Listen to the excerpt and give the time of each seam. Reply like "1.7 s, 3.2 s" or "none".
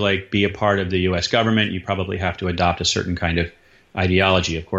none